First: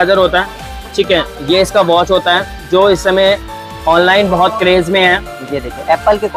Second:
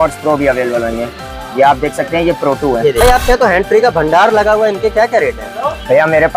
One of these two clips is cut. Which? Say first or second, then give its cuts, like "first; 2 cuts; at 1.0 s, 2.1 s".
second; 1 cut; at 3.0 s